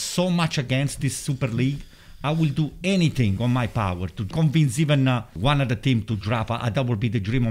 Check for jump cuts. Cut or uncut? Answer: cut